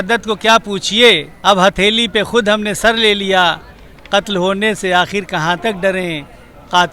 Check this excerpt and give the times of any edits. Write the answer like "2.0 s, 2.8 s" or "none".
1.3 s